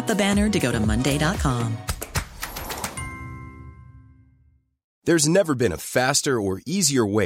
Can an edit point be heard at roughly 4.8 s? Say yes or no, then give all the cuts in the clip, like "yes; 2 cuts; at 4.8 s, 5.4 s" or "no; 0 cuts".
yes; 1 cut; at 4.8 s